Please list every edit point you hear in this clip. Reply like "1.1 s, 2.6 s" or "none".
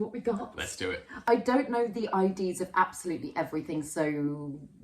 none